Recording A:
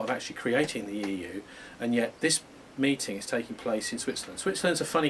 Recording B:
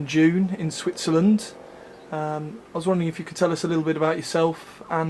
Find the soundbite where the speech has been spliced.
A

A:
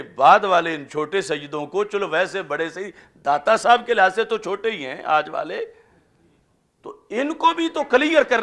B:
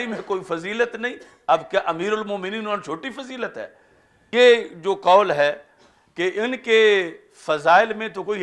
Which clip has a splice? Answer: B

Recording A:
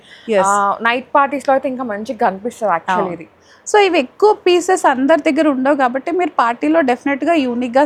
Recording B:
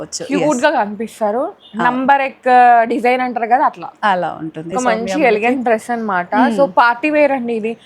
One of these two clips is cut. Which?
B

